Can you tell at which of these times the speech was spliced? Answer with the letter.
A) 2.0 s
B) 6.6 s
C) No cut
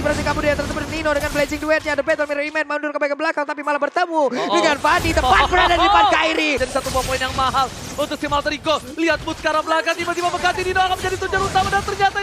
B